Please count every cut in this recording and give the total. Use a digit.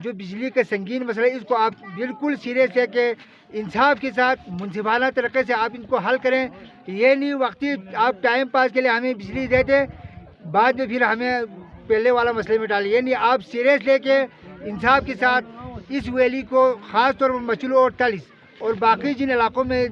0